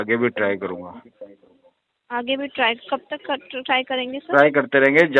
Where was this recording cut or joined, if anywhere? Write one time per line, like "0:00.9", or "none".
none

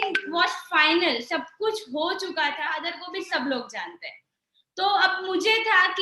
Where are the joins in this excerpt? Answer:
0:03.0

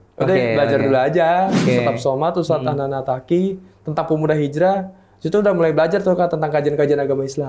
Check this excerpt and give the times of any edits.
0:01.6

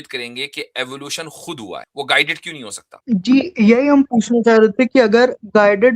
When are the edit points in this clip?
0:01.9
0:02.8

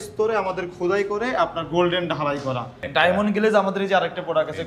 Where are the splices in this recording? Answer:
0:02.8

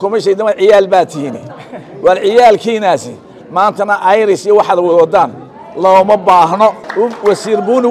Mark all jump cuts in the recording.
0:06.9

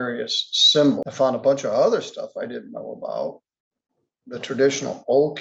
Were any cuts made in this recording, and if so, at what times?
0:01.0

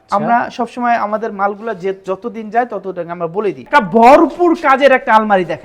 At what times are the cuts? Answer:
0:03.6

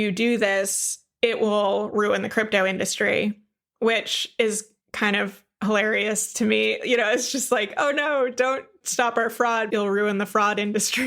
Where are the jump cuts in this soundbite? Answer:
0:09.7

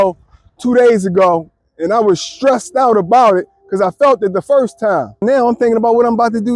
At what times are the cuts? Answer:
0:05.2

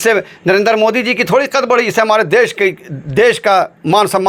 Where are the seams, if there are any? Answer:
none

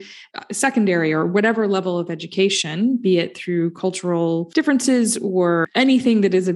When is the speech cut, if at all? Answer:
0:04.5
0:05.7

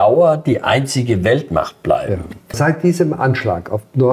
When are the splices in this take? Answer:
0:02.6

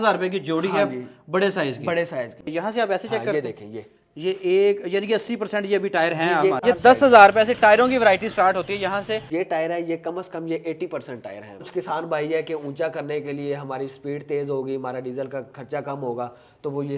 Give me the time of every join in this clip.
0:02.4
0:06.6
0:09.3
0:11.7

